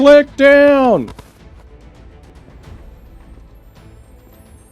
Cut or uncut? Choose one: cut